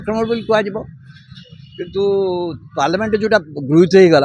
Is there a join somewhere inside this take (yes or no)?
no